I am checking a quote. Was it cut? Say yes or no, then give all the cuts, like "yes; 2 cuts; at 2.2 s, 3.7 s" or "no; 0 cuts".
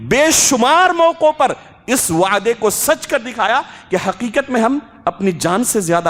no; 0 cuts